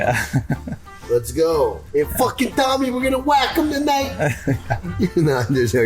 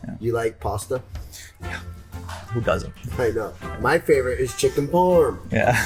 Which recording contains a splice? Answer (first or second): first